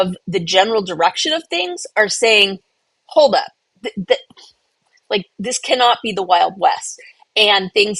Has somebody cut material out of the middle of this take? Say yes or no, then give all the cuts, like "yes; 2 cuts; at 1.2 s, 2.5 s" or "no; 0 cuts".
no; 0 cuts